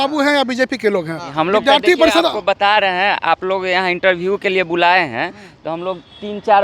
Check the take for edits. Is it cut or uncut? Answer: cut